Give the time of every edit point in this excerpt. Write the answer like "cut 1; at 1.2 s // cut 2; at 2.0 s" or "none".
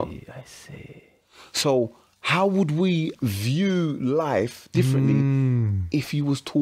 cut 1; at 3.1 s